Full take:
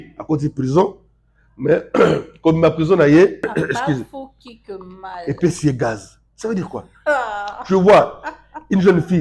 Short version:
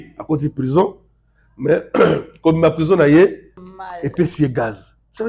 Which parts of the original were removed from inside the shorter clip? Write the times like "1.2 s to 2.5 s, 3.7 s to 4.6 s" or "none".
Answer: 3.4 s to 4.7 s